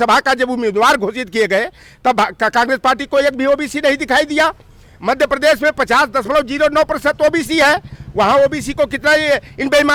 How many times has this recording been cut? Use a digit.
0